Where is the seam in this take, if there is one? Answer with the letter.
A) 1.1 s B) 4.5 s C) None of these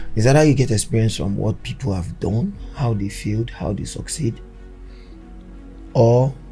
C